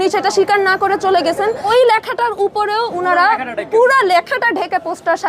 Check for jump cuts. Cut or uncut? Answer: cut